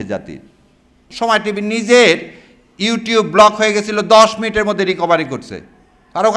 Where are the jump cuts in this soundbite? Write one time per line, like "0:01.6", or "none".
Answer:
0:01.0